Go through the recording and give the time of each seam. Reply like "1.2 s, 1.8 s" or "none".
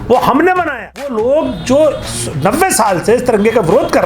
1.1 s